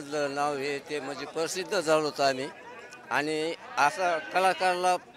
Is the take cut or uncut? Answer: uncut